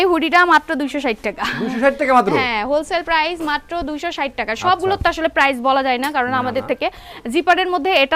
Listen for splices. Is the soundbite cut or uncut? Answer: uncut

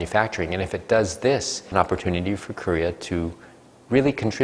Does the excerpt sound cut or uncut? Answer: cut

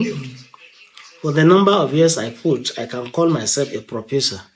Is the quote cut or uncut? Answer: uncut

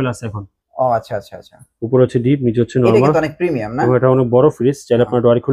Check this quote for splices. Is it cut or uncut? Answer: uncut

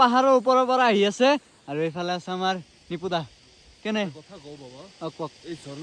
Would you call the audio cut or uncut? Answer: uncut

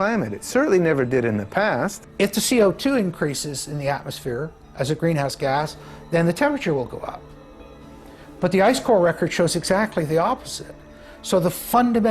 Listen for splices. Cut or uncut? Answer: cut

